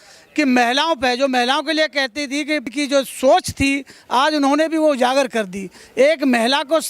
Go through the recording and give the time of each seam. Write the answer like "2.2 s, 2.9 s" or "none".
none